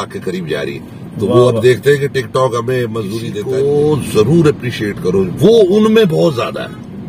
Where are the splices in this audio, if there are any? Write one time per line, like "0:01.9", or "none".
0:03.3